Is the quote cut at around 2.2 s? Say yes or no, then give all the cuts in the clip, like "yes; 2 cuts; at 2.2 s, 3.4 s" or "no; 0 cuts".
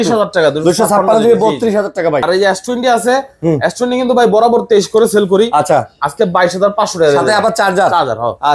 yes; 1 cut; at 2.2 s